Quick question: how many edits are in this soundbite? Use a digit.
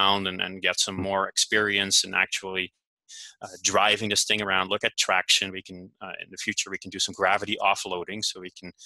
0